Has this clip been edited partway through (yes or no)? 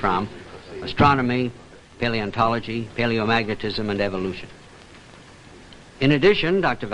no